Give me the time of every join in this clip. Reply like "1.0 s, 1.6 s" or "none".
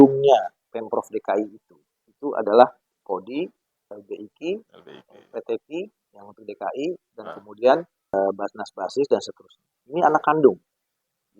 2.9 s, 8.1 s